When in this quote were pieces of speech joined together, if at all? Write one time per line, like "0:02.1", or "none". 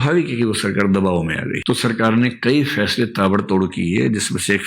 0:01.6